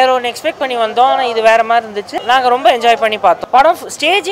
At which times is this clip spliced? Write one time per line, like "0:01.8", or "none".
0:02.1
0:03.4

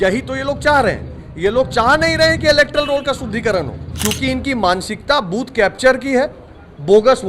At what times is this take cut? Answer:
0:03.8

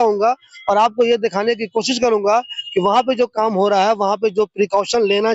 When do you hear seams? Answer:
none

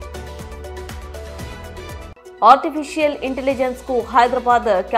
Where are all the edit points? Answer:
0:02.1

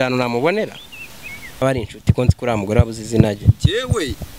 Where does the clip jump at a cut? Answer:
0:01.6

